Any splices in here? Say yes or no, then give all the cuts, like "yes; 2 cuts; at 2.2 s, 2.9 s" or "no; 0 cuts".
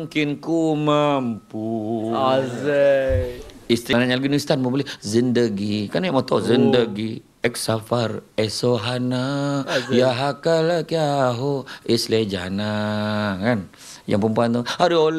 yes; 1 cut; at 3.9 s